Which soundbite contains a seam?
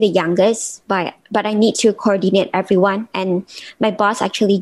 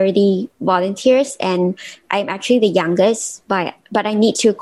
first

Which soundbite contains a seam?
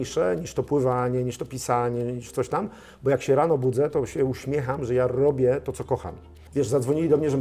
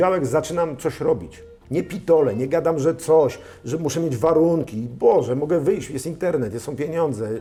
first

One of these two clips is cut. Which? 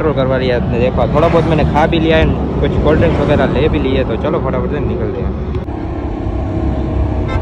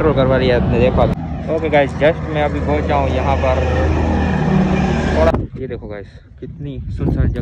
second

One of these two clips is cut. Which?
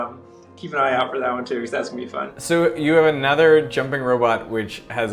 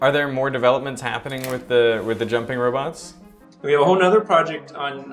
first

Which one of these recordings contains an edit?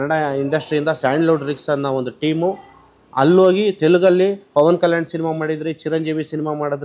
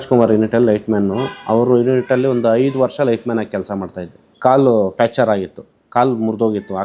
second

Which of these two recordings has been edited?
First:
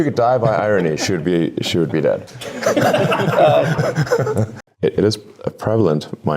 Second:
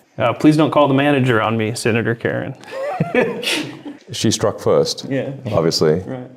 first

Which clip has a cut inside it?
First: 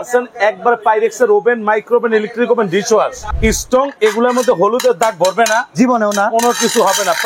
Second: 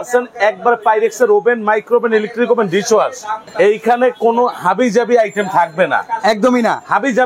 first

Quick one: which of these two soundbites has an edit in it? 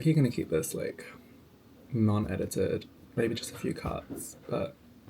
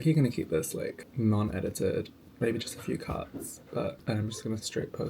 second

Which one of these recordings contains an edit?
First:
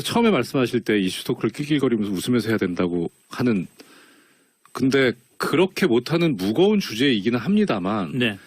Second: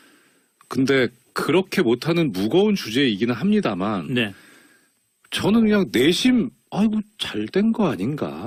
first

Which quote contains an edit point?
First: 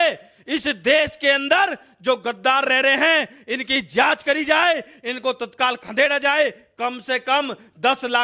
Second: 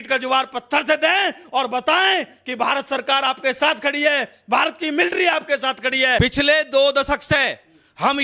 second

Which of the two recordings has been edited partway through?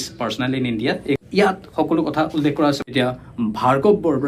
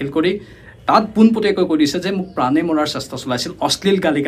first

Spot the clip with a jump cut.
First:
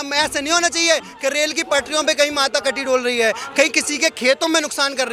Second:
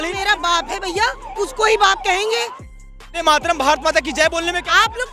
second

